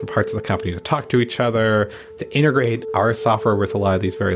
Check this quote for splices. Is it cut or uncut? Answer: uncut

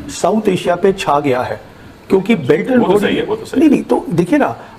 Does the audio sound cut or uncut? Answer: uncut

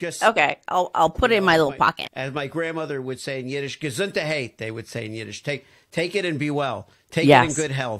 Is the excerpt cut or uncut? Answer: uncut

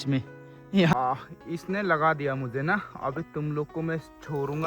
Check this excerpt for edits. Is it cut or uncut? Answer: cut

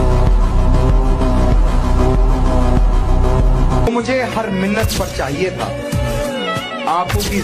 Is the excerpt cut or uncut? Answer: cut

